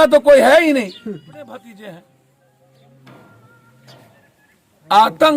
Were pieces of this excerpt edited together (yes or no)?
yes